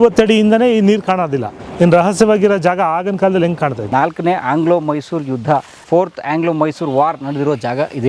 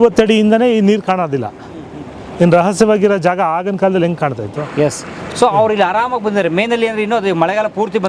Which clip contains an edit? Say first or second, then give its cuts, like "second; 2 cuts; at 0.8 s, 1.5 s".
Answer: first; 2 cuts; at 1.6 s, 3.8 s